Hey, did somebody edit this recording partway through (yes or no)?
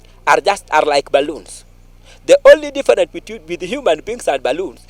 no